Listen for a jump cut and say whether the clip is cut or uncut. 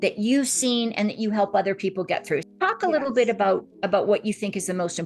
cut